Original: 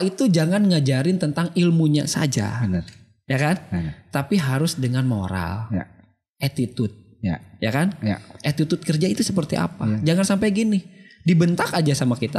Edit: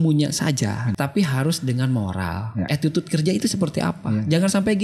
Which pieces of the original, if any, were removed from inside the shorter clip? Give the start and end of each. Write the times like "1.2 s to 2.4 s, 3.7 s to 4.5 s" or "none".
2.7 s to 4.1 s, 5.8 s to 8.4 s

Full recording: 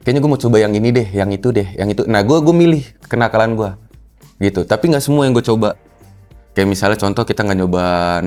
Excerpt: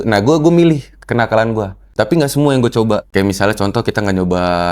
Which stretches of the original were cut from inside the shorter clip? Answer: 3.9 s to 4.6 s, 5.8 s to 6.5 s

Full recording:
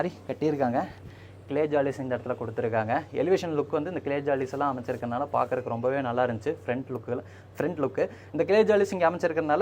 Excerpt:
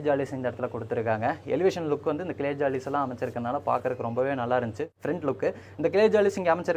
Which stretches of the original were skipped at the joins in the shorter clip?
6.5 s to 7.4 s

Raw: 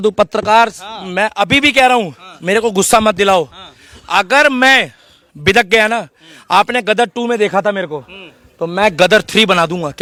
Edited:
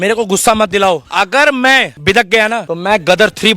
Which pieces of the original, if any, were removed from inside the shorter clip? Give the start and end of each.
3.5 s to 4.0 s, 4.9 s to 5.3 s, 6.0 s to 8.6 s

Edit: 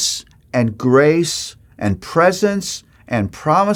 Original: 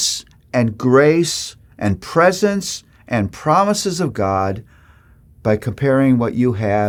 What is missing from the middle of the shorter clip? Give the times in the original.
none

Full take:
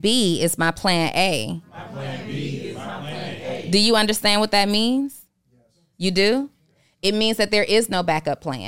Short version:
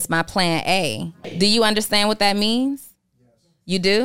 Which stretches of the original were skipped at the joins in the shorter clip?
1.7 s to 3.5 s

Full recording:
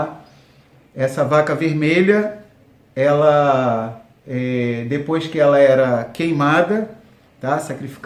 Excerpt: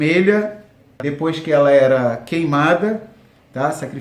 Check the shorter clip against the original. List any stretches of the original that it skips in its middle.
2.8 s to 4.9 s

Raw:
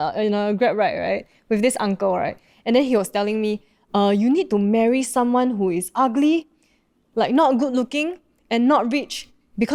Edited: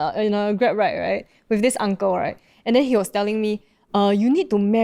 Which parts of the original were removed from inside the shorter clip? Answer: none

